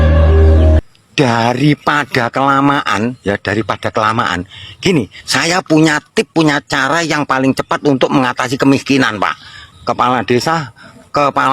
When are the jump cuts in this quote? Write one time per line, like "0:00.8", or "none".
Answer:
0:00.8
0:09.7